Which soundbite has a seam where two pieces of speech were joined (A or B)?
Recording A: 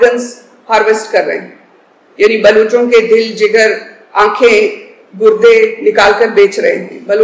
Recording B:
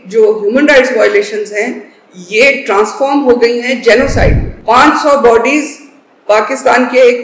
B